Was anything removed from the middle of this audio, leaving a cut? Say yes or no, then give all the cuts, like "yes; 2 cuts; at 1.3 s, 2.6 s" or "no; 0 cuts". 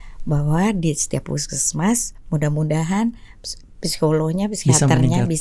no; 0 cuts